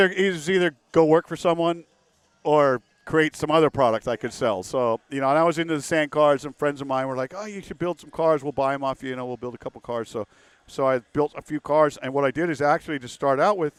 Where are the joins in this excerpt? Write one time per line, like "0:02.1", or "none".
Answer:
none